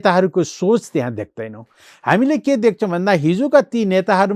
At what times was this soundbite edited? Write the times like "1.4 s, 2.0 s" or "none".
none